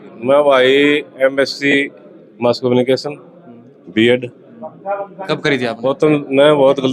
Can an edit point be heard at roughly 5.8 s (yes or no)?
yes